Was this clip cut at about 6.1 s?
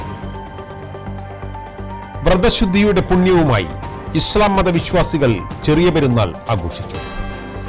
no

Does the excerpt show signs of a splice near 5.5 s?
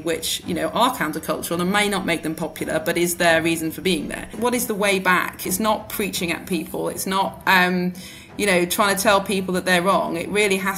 yes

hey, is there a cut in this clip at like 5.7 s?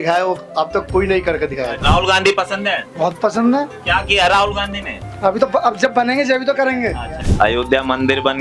no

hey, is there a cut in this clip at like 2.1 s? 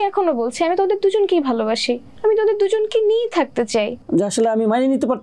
yes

